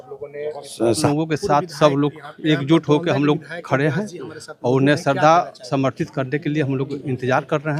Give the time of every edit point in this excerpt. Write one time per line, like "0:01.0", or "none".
0:01.1